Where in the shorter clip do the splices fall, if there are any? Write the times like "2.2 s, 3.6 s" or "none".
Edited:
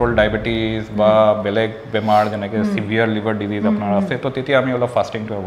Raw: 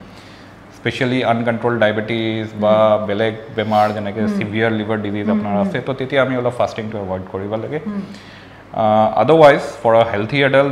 none